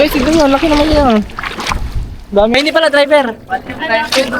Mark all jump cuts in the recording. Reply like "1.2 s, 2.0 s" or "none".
2.5 s